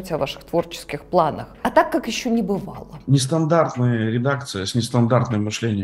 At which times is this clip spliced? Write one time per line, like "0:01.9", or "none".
0:01.5
0:03.1